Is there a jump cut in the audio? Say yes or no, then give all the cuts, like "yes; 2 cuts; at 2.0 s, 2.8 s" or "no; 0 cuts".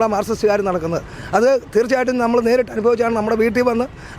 no; 0 cuts